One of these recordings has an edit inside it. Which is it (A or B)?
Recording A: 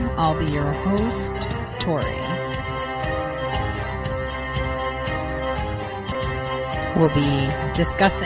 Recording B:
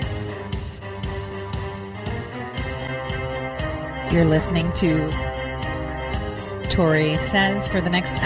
A